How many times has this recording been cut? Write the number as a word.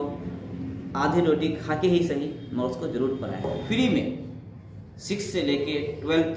one